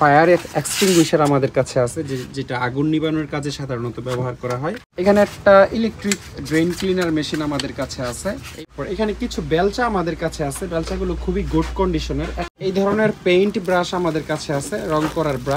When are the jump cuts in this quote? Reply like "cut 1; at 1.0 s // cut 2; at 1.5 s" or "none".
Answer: cut 1; at 4.9 s // cut 2; at 8.5 s // cut 3; at 12.4 s